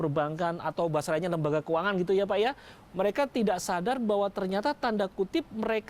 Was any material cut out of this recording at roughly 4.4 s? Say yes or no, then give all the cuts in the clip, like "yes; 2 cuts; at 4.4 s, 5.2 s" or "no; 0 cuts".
no; 1 cut; at 2.7 s